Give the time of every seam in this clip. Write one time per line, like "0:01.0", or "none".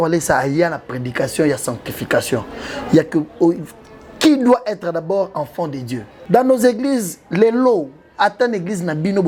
0:06.1